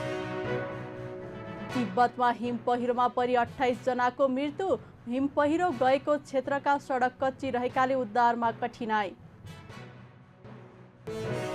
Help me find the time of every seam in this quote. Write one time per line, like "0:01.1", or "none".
none